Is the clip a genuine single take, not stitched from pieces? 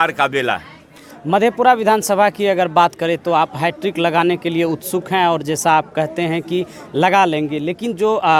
yes; 0 cuts

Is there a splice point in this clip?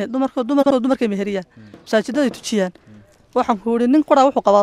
no; 0 cuts

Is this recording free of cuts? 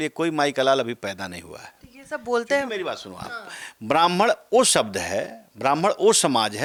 yes; 0 cuts

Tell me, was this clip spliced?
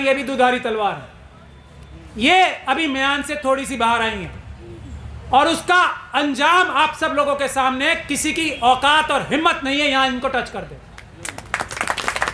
no; 0 cuts

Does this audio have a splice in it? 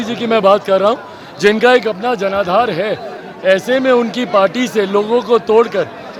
no; 0 cuts

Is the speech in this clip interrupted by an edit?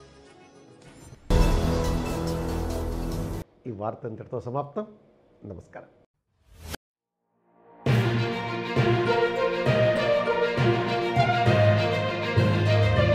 no; 0 cuts

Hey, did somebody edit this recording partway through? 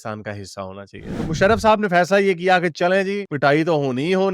yes; 1 cut; at 1.1 s

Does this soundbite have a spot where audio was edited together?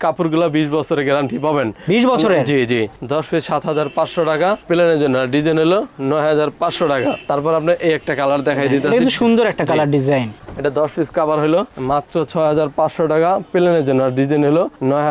no; 0 cuts

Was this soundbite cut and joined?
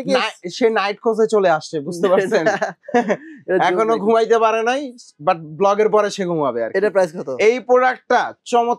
no; 0 cuts

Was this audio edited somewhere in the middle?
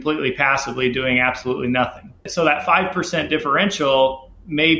no; 0 cuts

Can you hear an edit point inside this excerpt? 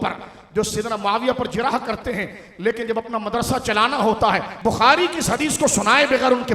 yes; 1 cut; at 4.5 s

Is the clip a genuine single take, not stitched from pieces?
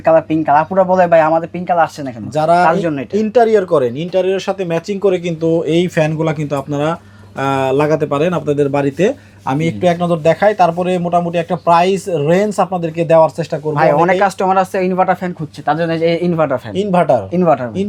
yes; 0 cuts

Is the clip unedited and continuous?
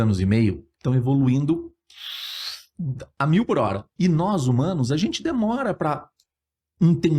no; 1 cut; at 3.9 s

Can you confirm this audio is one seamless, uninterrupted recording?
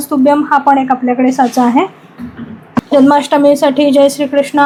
yes; 0 cuts

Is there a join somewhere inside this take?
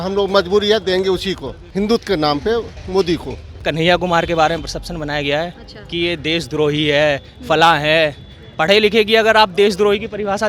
yes; 2 cuts; at 1.6 s, 3.6 s

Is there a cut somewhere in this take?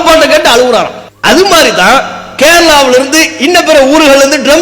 yes; 1 cut; at 1.0 s

